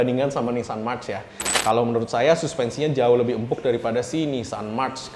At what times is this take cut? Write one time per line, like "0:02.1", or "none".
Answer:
0:01.5